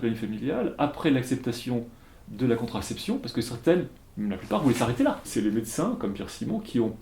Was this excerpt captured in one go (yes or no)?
no